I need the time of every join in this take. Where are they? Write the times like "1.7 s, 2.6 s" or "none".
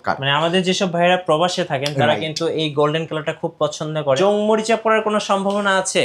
4.2 s